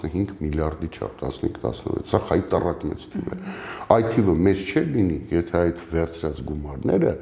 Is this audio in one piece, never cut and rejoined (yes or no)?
yes